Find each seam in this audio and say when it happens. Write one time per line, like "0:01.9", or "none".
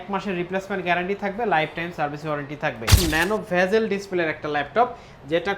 0:03.0